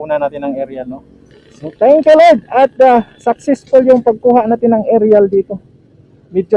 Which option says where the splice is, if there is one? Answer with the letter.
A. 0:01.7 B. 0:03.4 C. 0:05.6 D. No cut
A